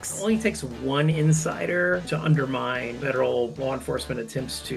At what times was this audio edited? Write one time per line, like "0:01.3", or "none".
0:02.0